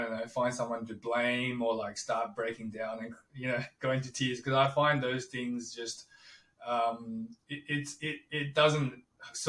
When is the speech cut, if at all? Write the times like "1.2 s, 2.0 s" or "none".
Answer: none